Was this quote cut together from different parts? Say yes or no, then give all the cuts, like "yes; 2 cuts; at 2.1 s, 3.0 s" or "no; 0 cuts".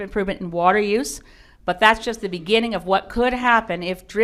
no; 0 cuts